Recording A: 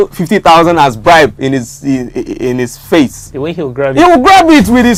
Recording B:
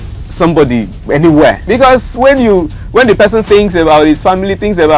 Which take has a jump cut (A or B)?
B